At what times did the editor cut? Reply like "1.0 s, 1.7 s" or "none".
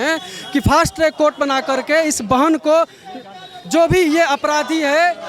none